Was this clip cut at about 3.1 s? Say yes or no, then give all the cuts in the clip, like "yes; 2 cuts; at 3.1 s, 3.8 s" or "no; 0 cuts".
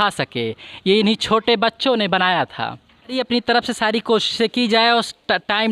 yes; 1 cut; at 3.1 s